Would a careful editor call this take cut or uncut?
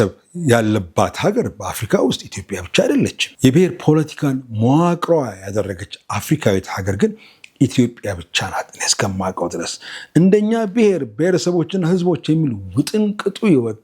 cut